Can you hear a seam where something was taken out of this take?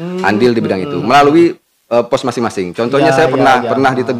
no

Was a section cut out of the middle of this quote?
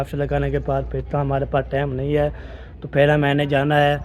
no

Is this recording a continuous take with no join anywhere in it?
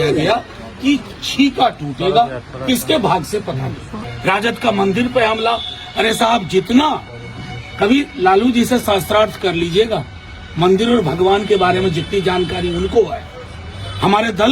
no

